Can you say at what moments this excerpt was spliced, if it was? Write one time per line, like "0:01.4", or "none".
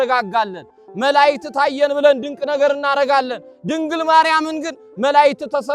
none